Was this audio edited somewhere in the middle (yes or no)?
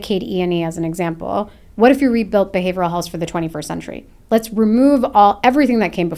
no